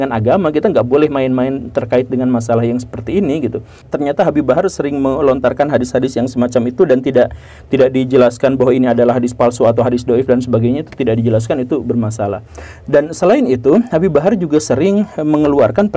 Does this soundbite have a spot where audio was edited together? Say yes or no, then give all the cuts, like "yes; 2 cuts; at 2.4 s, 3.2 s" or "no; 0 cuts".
yes; 1 cut; at 3.8 s